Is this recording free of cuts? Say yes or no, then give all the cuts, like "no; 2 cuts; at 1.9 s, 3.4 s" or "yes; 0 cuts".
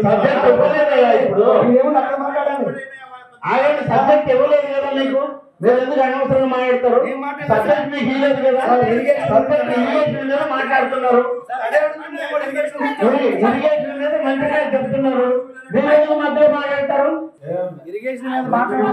no; 1 cut; at 17.4 s